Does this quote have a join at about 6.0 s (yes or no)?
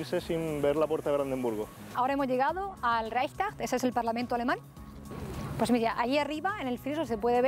no